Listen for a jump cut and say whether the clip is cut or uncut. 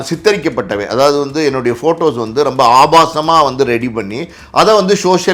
uncut